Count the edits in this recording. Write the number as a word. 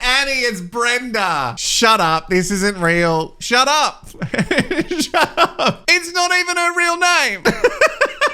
three